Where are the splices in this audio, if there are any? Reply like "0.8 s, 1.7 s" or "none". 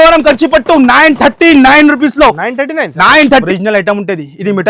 3.4 s